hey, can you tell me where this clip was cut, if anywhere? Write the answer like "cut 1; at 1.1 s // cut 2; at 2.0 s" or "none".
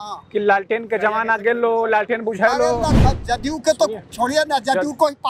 cut 1; at 3.0 s